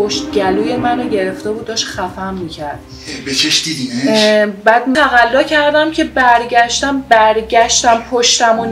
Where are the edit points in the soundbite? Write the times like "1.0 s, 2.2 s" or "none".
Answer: 4.9 s